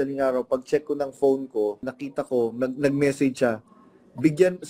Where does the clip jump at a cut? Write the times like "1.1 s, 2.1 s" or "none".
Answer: 2.0 s